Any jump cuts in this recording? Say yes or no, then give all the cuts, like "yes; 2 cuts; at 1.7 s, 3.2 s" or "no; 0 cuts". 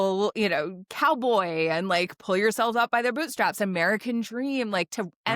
no; 0 cuts